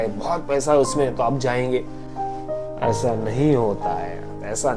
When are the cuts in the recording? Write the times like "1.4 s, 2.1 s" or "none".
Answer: none